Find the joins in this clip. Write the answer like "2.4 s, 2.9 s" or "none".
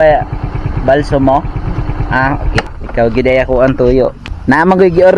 2.8 s, 4.3 s